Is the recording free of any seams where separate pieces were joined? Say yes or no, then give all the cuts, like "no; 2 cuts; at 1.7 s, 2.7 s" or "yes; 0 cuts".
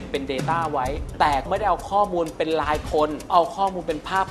no; 2 cuts; at 1.5 s, 3.3 s